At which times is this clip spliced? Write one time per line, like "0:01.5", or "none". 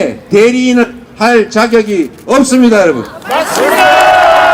none